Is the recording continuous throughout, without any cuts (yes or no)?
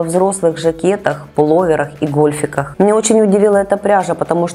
no